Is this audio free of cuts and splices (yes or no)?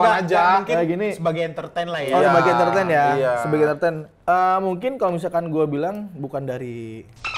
yes